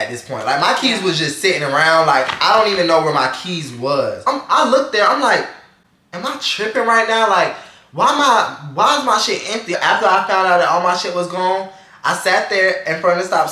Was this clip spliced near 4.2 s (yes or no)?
yes